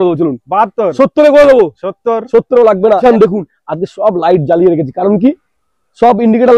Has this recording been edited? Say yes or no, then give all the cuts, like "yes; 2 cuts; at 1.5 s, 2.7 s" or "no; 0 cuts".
yes; 1 cut; at 3.0 s